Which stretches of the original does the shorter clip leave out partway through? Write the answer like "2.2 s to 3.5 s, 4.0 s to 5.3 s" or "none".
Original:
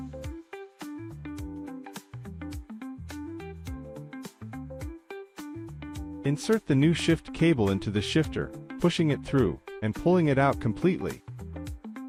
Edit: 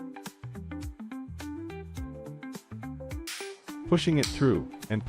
5.4 s to 8.6 s